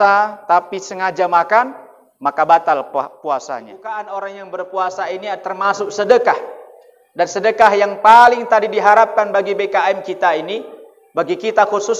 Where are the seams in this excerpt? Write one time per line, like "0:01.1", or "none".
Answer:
0:03.8